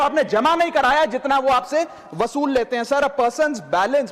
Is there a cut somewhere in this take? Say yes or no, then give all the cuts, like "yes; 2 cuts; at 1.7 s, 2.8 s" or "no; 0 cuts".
no; 0 cuts